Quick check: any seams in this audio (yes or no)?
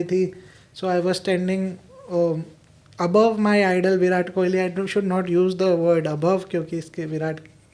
no